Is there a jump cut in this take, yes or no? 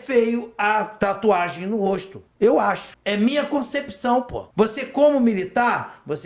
yes